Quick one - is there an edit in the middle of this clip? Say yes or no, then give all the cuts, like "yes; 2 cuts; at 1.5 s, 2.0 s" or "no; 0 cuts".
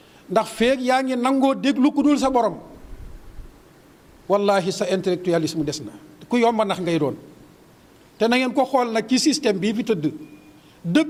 no; 0 cuts